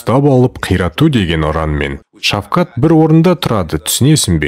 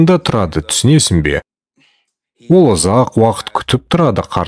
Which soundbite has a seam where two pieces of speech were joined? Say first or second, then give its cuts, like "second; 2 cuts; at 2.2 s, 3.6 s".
first; 1 cut; at 2.0 s